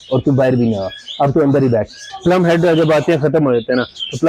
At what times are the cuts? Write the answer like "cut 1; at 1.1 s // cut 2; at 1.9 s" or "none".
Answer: cut 1; at 2.0 s